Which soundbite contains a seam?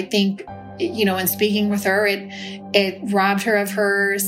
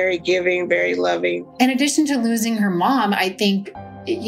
second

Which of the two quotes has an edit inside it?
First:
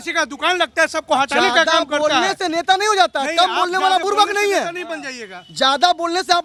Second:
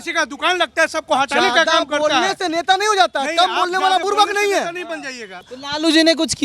second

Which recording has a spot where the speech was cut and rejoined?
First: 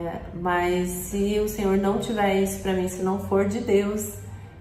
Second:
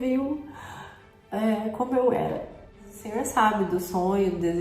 second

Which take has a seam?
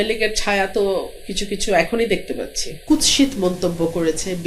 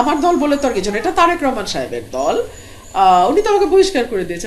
first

